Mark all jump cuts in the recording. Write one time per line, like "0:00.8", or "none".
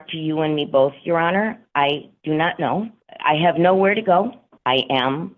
0:03.0
0:04.5